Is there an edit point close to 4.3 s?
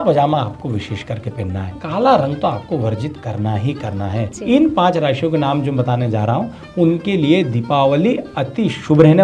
yes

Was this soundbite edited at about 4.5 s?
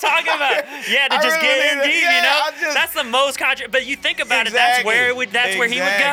no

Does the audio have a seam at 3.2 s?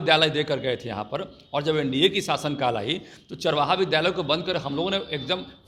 no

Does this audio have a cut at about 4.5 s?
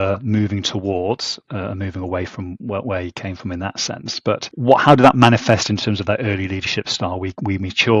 yes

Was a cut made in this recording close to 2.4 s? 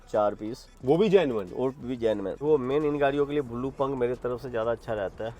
yes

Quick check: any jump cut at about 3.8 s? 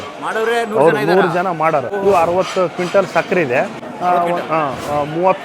yes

